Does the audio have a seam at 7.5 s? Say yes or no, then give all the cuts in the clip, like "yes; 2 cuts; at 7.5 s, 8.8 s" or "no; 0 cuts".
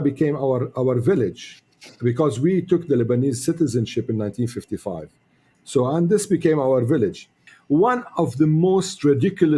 yes; 1 cut; at 7.5 s